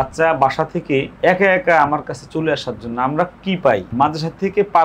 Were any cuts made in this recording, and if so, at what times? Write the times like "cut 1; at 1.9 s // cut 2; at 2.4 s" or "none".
cut 1; at 1.1 s // cut 2; at 3.9 s